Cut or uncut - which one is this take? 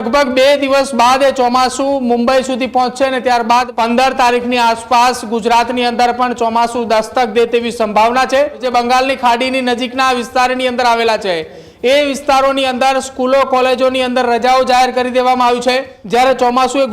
cut